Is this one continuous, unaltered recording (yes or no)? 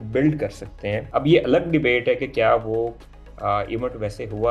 no